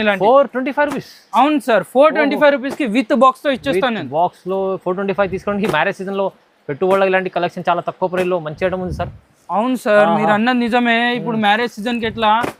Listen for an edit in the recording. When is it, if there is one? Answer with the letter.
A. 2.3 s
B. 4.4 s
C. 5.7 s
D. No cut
D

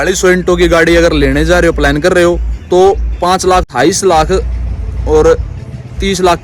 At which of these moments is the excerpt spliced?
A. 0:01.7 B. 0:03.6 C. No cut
B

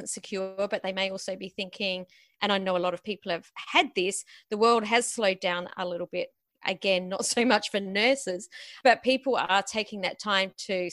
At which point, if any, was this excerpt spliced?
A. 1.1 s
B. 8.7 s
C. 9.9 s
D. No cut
B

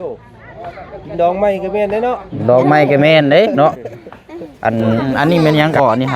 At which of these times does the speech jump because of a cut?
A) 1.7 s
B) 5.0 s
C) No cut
B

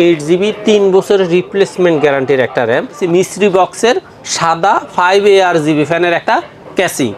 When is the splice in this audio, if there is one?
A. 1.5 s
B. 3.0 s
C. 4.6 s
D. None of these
B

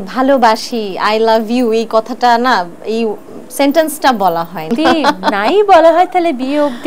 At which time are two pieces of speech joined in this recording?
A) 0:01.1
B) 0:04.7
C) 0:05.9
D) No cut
B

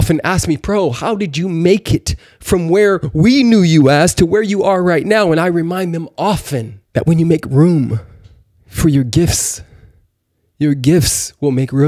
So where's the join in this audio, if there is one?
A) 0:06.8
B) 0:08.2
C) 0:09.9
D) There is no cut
A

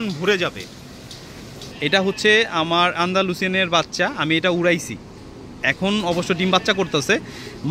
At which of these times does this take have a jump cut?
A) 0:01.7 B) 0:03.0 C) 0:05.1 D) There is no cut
A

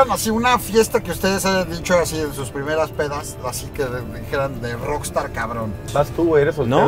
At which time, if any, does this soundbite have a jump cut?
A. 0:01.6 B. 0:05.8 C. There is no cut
B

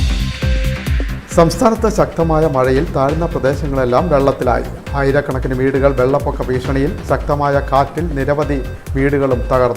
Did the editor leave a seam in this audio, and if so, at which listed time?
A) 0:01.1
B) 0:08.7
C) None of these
A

